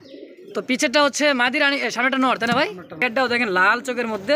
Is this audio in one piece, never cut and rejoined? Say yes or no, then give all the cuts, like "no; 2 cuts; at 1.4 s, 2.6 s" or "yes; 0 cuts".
no; 1 cut; at 3.1 s